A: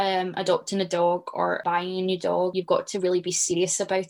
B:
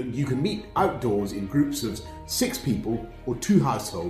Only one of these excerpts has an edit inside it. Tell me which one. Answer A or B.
A